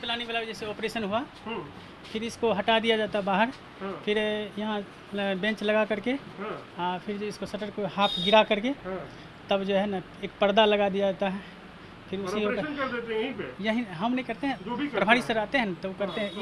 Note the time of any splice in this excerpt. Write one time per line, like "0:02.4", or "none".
none